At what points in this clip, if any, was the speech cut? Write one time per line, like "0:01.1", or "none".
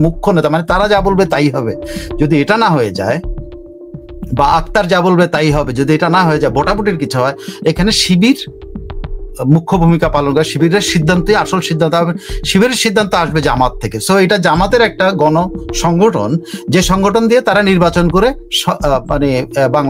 none